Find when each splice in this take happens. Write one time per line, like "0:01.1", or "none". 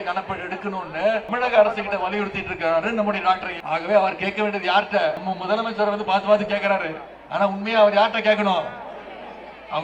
0:01.3
0:03.5
0:05.2